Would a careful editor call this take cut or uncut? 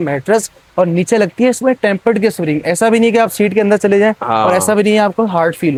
uncut